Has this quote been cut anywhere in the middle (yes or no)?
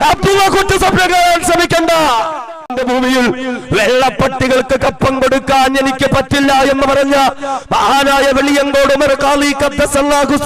yes